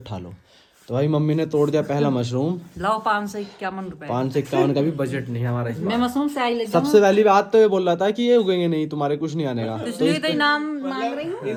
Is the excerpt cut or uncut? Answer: uncut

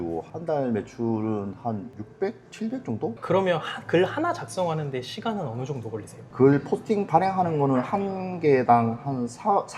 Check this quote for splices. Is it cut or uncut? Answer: cut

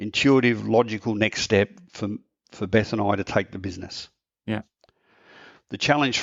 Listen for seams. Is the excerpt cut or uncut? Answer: uncut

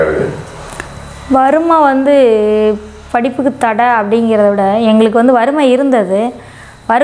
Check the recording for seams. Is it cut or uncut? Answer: uncut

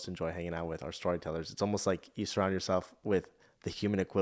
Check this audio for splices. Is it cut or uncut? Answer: uncut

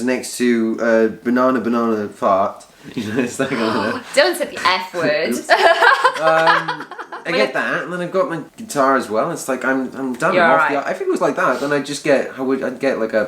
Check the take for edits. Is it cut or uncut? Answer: uncut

